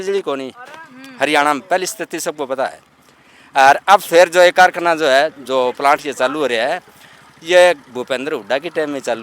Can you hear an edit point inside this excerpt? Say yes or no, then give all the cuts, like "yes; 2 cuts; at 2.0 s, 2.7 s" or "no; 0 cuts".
no; 0 cuts